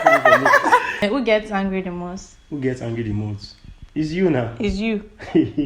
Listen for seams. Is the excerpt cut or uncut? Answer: cut